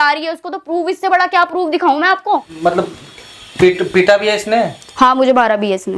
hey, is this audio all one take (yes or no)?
no